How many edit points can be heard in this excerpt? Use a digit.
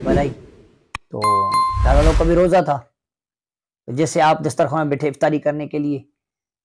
0